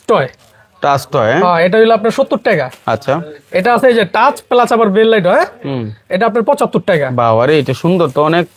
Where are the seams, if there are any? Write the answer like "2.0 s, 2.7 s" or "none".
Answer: none